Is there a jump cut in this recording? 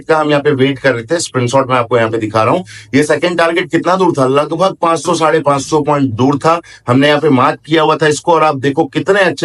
no; 0 cuts

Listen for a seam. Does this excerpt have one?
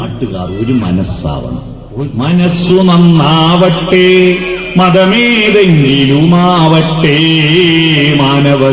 yes; 1 cut; at 2.1 s

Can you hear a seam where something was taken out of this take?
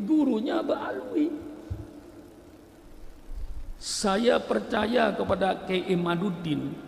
no; 0 cuts

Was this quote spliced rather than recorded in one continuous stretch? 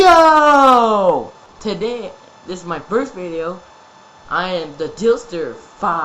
yes; 1 cut; at 1.4 s

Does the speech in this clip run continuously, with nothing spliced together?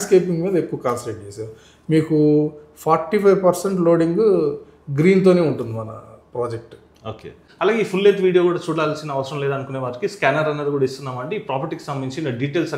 no; 1 cut; at 7.4 s

